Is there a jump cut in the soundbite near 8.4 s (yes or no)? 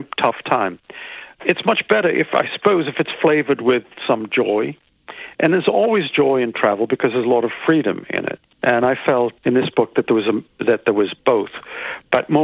yes